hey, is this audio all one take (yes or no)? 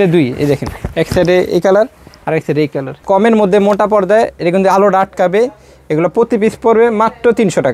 no